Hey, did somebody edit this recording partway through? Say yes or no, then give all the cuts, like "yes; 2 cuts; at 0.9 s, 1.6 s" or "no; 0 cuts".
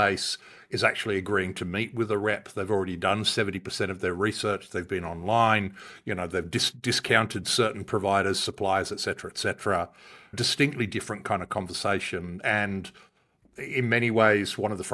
no; 0 cuts